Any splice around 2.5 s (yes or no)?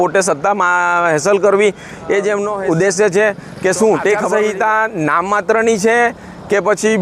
yes